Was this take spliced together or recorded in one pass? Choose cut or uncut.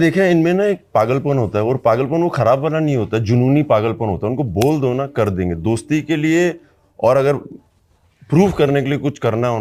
uncut